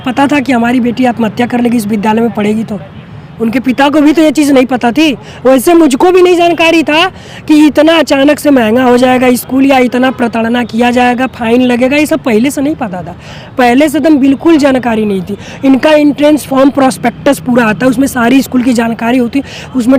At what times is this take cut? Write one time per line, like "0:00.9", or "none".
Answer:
none